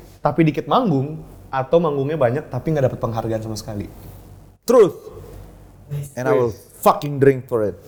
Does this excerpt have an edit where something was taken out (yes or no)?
no